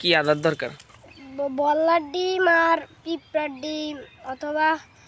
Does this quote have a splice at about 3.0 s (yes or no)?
no